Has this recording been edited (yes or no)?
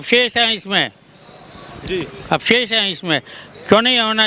no